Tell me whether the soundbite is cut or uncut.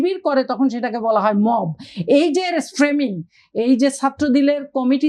uncut